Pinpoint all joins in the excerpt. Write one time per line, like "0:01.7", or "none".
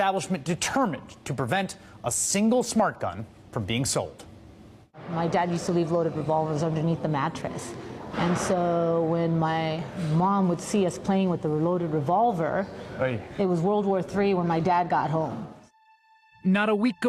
0:14.7